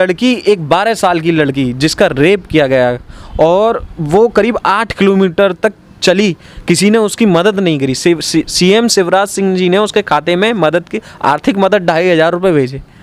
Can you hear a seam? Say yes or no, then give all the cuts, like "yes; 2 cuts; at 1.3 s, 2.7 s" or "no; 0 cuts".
no; 0 cuts